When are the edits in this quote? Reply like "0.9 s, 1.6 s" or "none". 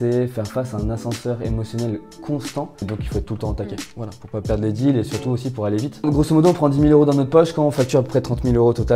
2.9 s, 6.0 s